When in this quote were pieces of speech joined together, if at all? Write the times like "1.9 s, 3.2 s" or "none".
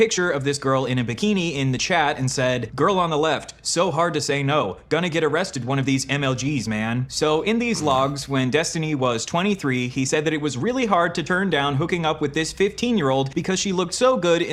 none